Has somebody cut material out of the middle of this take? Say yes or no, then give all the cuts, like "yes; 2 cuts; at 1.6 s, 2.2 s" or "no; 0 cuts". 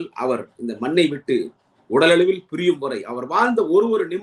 no; 0 cuts